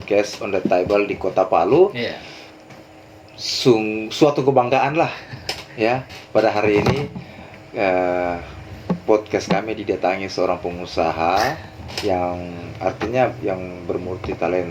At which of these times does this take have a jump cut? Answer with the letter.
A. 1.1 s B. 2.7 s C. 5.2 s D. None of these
D